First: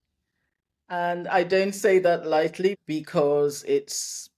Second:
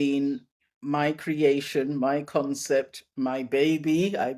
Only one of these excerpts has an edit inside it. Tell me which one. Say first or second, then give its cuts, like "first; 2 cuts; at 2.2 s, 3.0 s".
first; 1 cut; at 2.8 s